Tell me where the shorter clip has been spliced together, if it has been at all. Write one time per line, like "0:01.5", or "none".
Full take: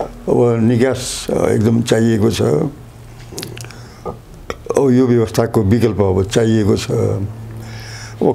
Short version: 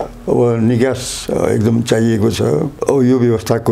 0:02.7